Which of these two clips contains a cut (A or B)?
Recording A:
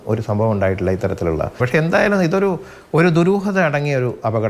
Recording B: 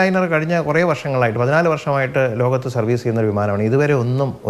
A